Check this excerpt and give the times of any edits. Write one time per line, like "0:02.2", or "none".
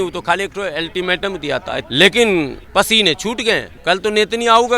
0:01.8
0:02.6
0:03.7